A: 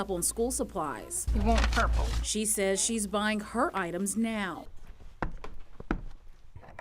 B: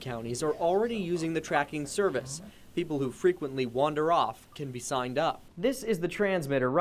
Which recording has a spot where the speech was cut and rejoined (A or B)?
A